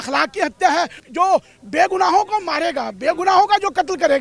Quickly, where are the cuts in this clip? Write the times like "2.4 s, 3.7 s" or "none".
1.0 s